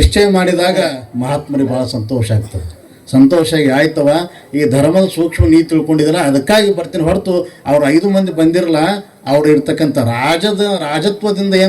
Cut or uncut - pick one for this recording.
cut